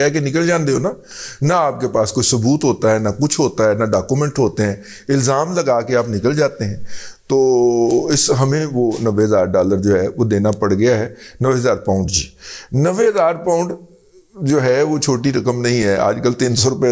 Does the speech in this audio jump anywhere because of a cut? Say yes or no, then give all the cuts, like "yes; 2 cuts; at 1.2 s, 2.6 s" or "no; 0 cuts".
no; 0 cuts